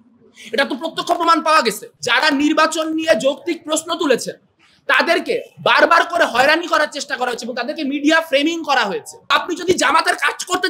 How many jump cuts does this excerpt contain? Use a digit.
2